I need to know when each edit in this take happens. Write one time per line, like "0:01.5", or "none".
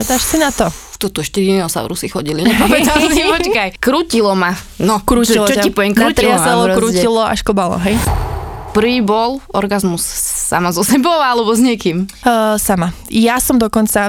0:03.7
0:08.1